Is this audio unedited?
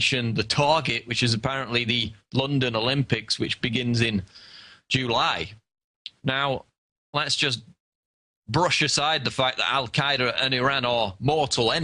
no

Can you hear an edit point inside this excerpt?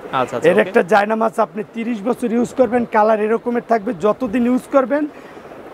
no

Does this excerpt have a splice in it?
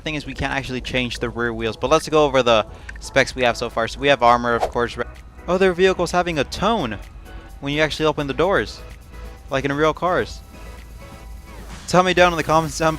yes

